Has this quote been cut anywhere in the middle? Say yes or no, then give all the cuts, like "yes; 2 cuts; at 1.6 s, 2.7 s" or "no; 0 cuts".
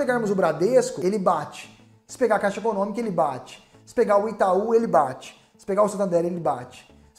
yes; 1 cut; at 1.0 s